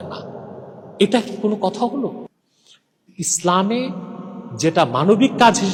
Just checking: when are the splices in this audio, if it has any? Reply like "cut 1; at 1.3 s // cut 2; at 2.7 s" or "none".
none